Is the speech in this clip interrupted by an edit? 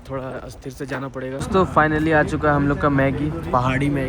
yes; 1 cut; at 1.4 s

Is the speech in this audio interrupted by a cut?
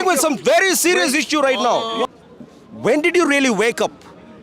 yes; 1 cut; at 2.1 s

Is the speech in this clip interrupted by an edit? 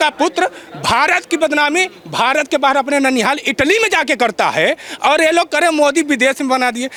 no; 0 cuts

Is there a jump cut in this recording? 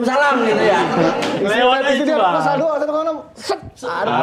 no; 0 cuts

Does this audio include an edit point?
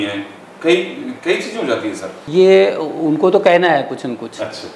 yes; 1 cut; at 2.1 s

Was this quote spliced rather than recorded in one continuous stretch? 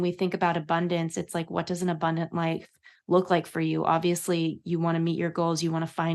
no; 0 cuts

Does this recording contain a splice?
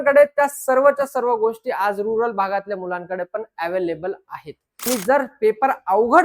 yes; 1 cut; at 4.7 s

